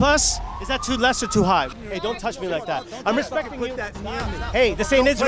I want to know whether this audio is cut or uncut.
cut